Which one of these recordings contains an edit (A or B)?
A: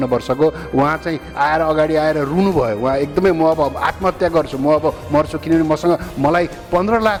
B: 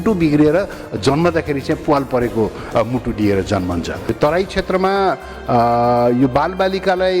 B